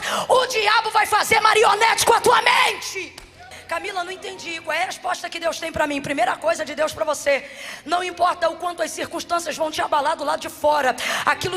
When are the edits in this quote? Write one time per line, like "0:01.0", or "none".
0:03.6